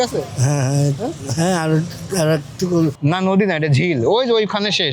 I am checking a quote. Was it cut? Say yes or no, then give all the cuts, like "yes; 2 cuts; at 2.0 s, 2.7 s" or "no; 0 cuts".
yes; 1 cut; at 3.0 s